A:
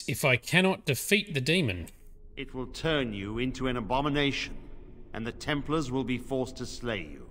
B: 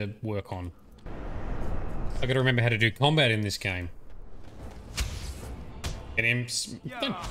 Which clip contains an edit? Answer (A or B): B